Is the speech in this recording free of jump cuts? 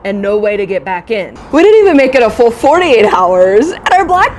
no; 1 cut; at 1.3 s

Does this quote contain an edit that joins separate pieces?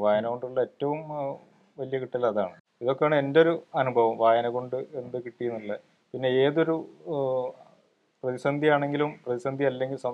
no; 0 cuts

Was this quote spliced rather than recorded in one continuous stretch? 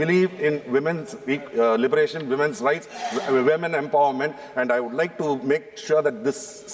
no; 0 cuts

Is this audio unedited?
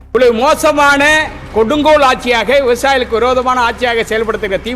yes; 0 cuts

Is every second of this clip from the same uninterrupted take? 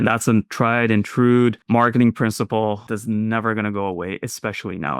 no; 2 cuts; at 1.6 s, 2.9 s

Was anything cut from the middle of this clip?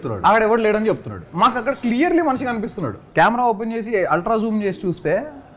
yes; 1 cut; at 3.0 s

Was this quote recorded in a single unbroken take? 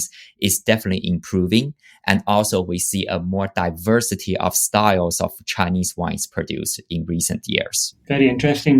no; 1 cut; at 7.9 s

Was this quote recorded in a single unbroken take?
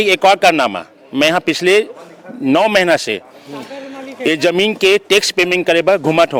yes; 0 cuts

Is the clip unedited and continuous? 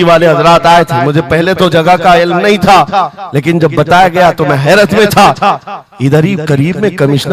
yes; 0 cuts

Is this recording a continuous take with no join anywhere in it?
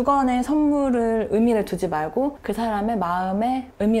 no; 1 cut; at 2.4 s

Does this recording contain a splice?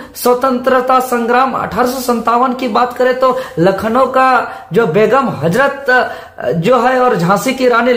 no; 0 cuts

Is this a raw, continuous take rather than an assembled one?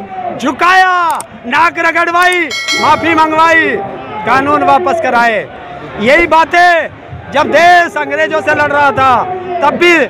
yes; 0 cuts

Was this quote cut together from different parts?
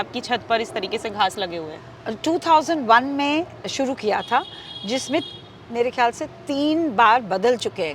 no; 0 cuts

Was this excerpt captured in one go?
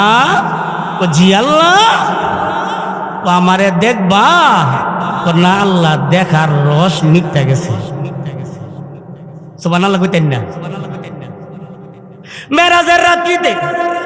yes; 0 cuts

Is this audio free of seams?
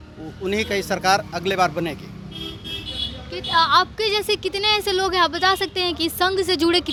yes; 0 cuts

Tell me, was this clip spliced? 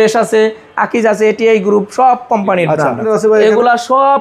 yes; 1 cut; at 3.0 s

